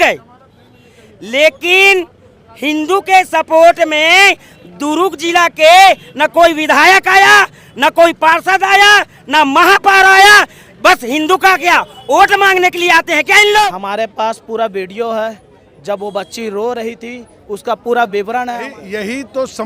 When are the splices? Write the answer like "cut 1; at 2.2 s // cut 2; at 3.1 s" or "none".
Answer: cut 1; at 13.7 s // cut 2; at 18.7 s